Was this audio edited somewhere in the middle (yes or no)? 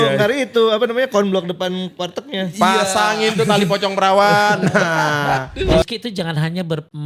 yes